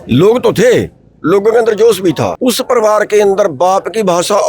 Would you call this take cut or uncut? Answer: cut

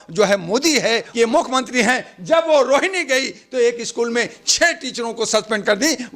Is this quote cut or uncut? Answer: cut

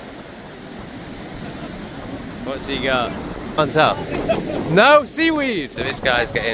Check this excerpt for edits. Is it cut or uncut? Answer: cut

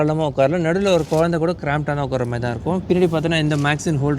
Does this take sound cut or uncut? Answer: uncut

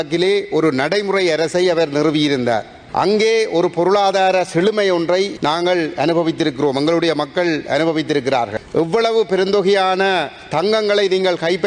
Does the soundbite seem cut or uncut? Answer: cut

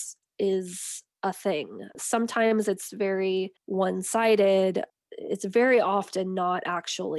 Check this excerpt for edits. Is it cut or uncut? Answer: cut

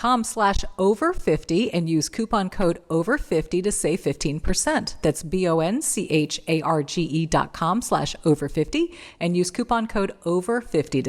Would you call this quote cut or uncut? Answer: uncut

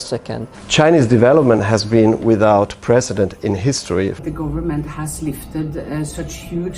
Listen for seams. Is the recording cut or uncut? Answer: cut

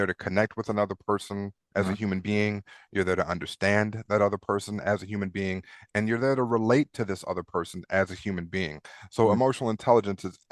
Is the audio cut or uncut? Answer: uncut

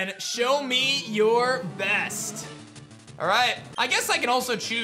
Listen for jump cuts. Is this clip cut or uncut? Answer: cut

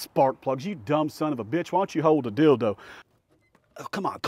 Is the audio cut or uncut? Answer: cut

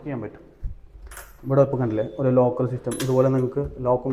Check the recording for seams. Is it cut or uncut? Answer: uncut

